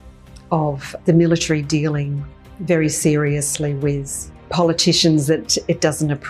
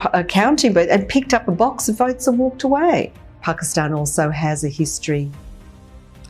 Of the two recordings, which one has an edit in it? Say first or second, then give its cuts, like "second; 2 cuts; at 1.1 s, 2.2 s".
second; 1 cut; at 3.1 s